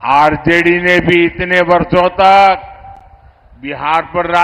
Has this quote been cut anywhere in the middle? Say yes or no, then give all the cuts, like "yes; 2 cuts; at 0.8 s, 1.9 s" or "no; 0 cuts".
no; 0 cuts